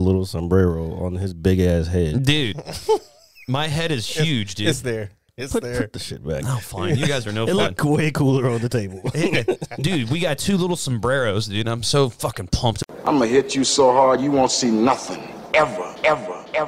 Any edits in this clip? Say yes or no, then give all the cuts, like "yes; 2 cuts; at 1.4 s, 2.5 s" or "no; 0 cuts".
yes; 1 cut; at 12.8 s